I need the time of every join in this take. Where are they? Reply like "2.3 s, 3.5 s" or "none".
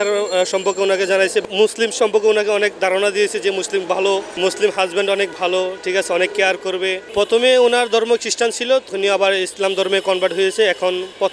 1.4 s, 4.4 s, 7.0 s, 8.9 s